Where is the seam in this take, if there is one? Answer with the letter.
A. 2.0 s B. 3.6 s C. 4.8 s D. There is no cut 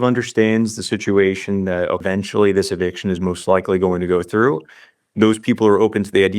A